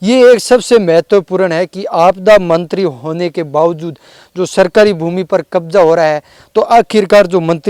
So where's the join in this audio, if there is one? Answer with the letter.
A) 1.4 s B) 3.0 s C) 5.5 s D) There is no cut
D